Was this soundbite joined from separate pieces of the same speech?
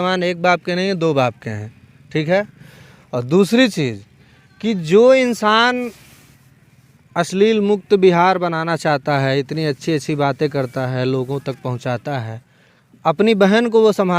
no; 0 cuts

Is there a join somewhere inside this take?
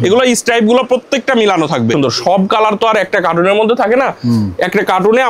yes; 1 cut; at 1.9 s

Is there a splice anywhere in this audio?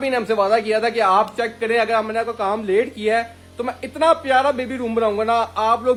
no; 0 cuts

